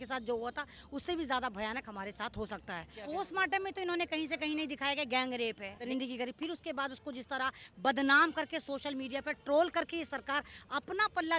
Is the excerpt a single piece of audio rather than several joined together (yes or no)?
no